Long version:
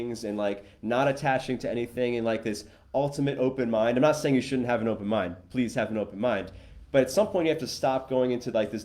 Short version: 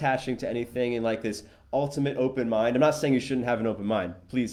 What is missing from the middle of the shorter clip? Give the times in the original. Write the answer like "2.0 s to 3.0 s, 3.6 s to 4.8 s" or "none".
none

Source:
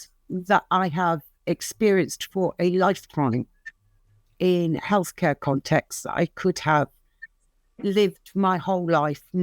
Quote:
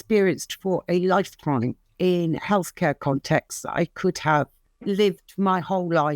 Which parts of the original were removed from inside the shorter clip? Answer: 3.5 s to 4.2 s, 7.1 s to 7.6 s

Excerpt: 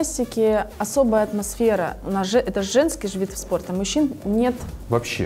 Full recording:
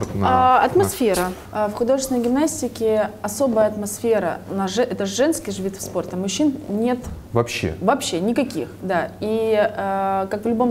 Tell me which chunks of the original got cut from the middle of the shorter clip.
none

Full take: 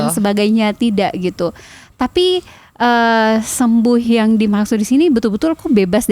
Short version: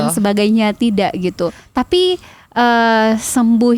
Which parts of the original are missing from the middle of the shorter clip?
1.6 s to 1.9 s

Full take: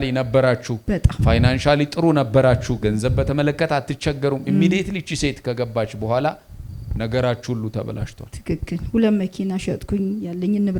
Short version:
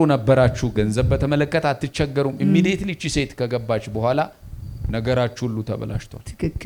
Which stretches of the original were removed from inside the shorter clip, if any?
none

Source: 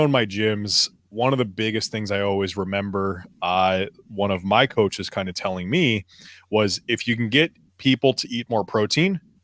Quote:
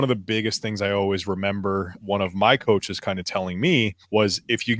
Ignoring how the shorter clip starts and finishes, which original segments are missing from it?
3.2 s to 4.0 s, 6.1 s to 6.4 s

